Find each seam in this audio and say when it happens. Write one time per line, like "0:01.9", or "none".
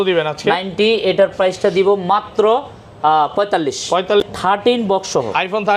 0:04.2